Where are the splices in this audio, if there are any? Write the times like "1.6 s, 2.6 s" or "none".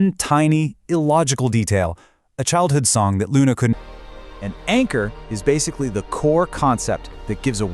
3.7 s